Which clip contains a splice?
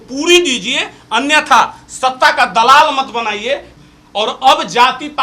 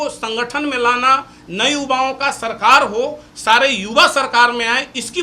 first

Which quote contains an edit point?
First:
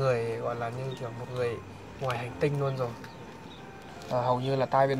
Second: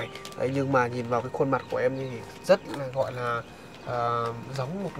first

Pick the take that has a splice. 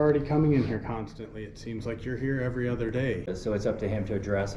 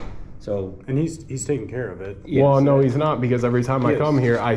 first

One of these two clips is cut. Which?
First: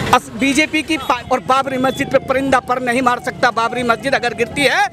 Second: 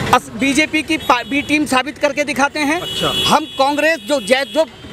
first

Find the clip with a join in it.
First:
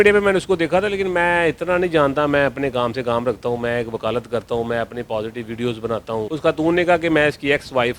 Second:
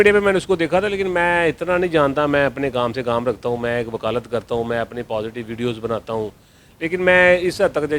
first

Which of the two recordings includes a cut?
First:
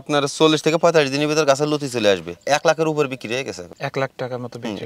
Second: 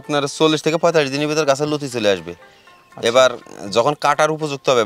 first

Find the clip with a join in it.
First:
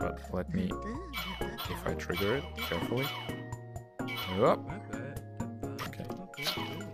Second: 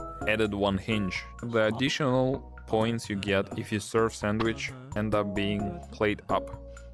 second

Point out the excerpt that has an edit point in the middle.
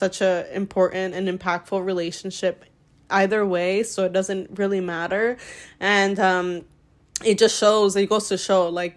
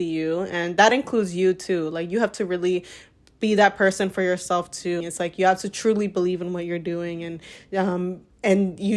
second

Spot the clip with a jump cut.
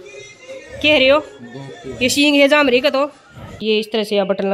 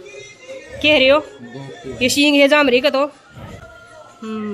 first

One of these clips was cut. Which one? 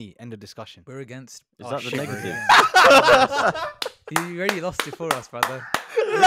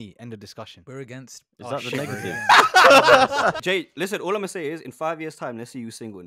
second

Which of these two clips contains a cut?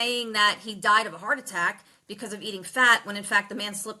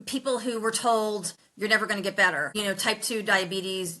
second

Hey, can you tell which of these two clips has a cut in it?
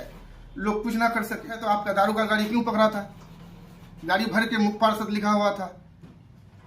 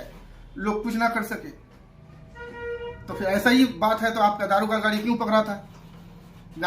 first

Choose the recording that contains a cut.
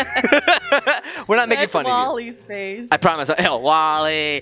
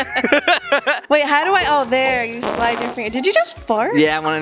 second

